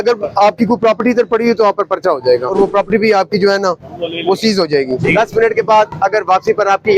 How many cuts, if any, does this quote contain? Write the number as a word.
two